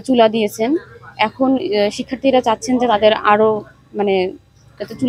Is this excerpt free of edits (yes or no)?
yes